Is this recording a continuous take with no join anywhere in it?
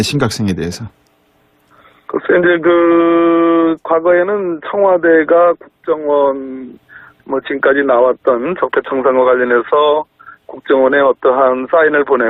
no; 1 cut; at 9.7 s

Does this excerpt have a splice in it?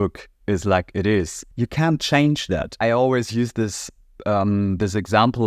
yes; 2 cuts; at 1.4 s, 2.7 s

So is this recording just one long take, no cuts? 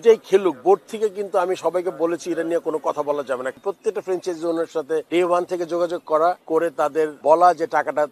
no; 3 cuts; at 3.5 s, 5.1 s, 6.8 s

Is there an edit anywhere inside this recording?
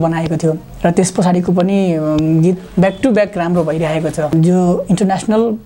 yes; 1 cut; at 4.3 s

